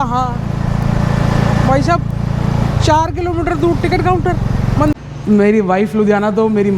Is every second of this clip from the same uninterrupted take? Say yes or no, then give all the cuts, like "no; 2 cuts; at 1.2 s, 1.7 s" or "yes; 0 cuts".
no; 1 cut; at 4.9 s